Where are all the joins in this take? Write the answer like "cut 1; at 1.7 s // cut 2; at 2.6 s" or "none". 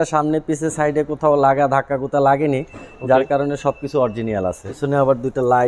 cut 1; at 4.7 s